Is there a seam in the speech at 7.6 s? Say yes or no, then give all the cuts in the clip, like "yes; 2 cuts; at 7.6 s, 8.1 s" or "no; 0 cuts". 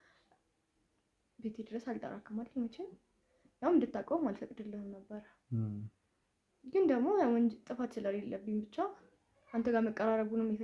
no; 0 cuts